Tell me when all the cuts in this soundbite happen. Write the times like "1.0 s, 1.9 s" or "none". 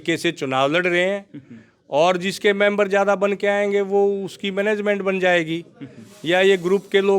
none